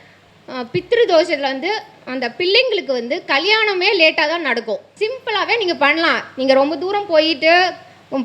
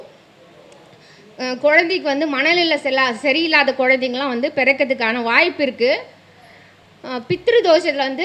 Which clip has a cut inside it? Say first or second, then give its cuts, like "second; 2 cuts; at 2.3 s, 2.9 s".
first; 1 cut; at 4.9 s